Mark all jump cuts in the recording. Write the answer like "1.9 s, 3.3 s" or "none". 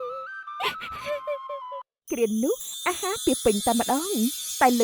2.0 s